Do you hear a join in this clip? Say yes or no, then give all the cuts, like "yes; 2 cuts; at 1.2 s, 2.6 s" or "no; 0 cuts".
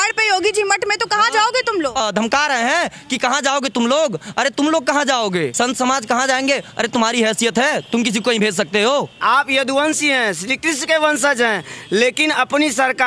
yes; 3 cuts; at 2.0 s, 5.5 s, 9.2 s